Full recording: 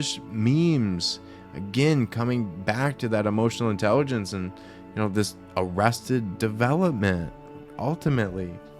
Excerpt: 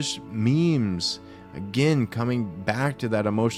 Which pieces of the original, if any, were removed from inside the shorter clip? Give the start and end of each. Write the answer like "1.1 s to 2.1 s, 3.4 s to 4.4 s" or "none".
none